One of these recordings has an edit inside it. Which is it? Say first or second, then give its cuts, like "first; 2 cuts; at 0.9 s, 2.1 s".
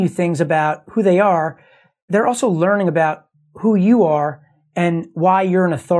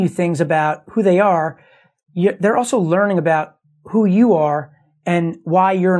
first; 1 cut; at 2.1 s